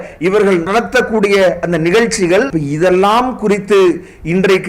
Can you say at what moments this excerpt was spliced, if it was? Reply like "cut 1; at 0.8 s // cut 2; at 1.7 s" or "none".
cut 1; at 2.5 s